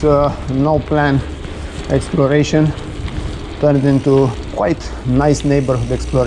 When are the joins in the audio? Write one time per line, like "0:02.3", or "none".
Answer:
none